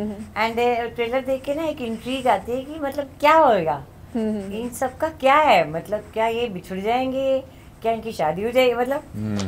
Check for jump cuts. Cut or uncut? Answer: uncut